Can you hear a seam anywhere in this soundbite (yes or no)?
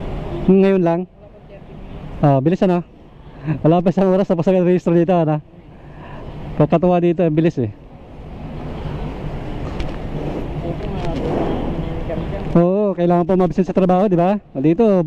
no